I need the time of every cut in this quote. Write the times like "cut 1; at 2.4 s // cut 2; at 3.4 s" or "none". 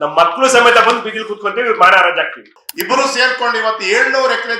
cut 1; at 2.5 s